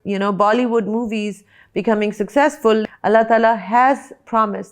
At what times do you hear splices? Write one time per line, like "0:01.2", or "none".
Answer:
0:02.8